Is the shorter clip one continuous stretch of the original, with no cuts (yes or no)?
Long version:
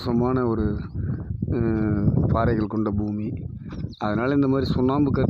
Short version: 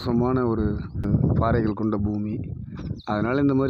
no